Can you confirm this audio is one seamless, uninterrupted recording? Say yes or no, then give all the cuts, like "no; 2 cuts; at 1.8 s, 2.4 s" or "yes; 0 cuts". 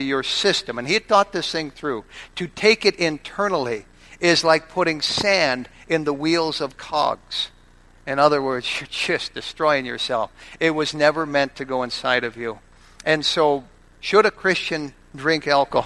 yes; 0 cuts